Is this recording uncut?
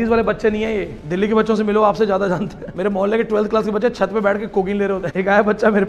no; 3 cuts; at 1.0 s, 2.6 s, 5.1 s

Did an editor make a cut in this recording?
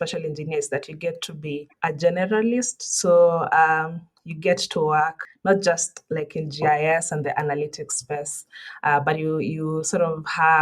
yes; 2 cuts; at 1.7 s, 5.3 s

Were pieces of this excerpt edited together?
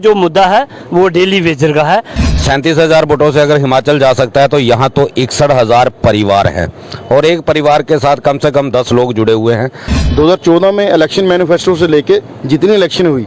yes; 2 cuts; at 2.2 s, 9.9 s

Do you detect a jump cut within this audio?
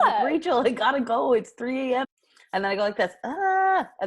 yes; 1 cut; at 2.0 s

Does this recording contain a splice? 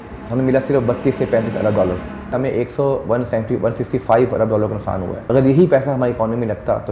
yes; 2 cuts; at 2.3 s, 5.2 s

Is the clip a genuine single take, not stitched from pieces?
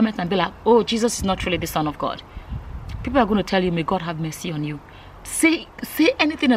yes; 0 cuts

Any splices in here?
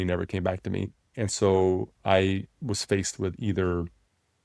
yes; 1 cut; at 1.1 s

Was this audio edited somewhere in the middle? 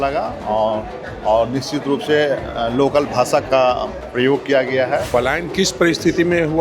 yes; 1 cut; at 5.1 s

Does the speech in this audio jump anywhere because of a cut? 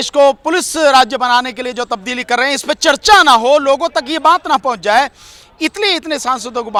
no; 0 cuts

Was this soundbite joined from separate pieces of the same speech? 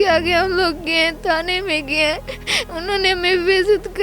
no; 0 cuts

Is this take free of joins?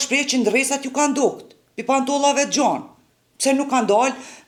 yes; 0 cuts

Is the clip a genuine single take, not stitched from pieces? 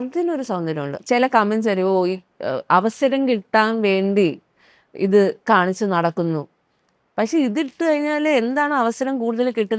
no; 1 cut; at 0.9 s

